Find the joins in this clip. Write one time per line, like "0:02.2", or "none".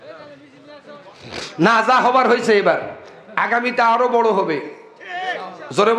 none